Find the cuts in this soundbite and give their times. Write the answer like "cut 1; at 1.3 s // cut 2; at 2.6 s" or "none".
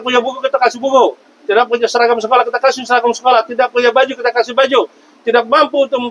none